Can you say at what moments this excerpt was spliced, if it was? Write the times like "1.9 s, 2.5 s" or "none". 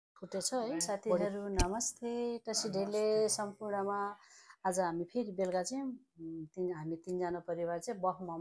1.2 s